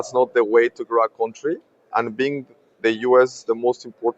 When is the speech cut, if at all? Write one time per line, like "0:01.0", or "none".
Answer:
0:01.9